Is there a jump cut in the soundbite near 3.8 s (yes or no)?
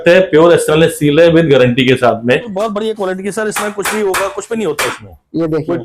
no